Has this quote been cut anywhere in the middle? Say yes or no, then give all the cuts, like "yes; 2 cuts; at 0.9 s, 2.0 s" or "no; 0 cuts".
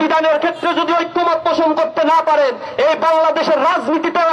no; 0 cuts